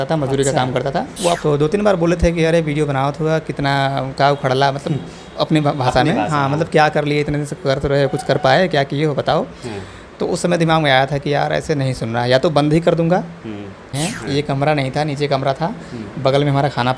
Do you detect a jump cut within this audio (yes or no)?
yes